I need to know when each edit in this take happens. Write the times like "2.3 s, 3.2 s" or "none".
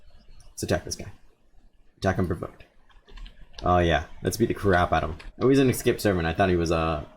5.2 s